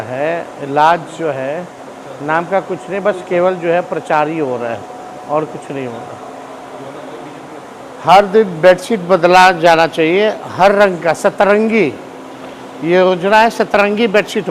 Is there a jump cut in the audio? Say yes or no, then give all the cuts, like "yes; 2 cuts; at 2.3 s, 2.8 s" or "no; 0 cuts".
no; 0 cuts